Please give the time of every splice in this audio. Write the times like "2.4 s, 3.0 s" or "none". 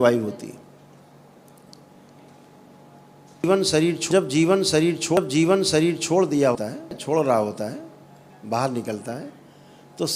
none

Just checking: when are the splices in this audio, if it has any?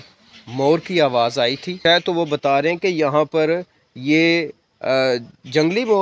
1.8 s

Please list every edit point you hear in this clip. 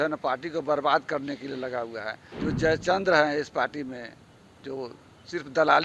2.2 s

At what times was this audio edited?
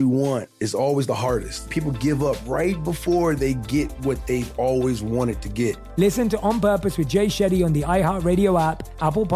1.7 s, 5.8 s

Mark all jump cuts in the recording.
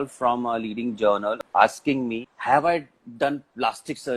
1.4 s, 2.3 s

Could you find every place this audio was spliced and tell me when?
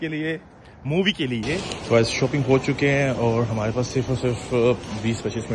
1.7 s

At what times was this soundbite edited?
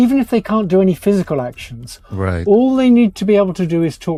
none

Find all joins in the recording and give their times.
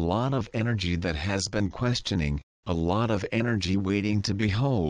1.6 s

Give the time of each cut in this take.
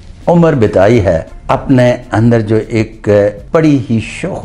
1.3 s, 3.4 s

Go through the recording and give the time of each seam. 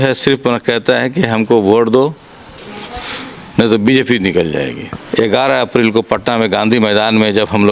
4.9 s

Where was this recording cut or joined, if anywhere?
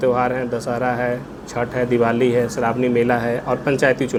none

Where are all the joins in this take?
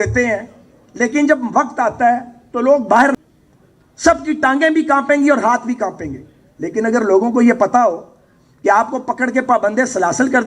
3.2 s

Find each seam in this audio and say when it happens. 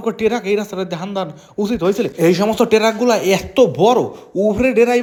none

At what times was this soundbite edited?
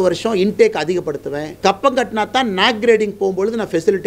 1.5 s

